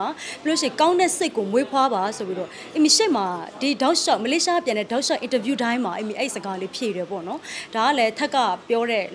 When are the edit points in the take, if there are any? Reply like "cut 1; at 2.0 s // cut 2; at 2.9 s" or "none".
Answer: none

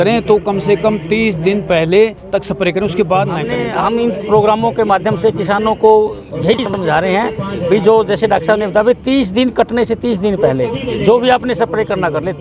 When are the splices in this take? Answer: cut 1; at 3.6 s

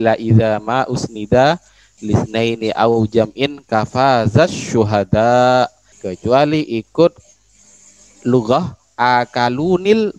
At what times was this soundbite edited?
none

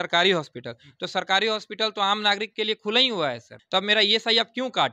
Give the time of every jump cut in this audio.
cut 1; at 3.5 s

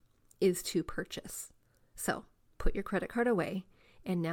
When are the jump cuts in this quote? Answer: none

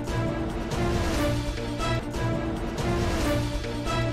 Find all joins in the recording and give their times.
none

